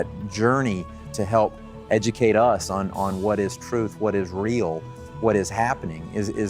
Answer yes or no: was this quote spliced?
yes